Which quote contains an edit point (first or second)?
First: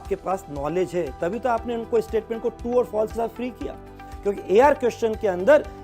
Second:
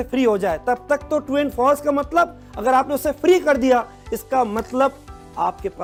first